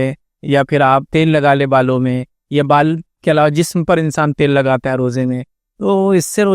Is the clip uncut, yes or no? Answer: no